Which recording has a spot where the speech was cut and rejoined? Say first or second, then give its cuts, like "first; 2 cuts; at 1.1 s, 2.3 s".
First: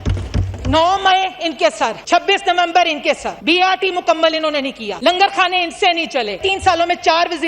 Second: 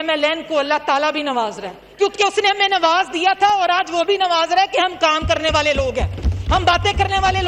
first; 4 cuts; at 2.0 s, 3.3 s, 4.8 s, 6.4 s